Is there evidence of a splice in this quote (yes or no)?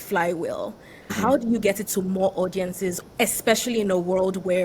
yes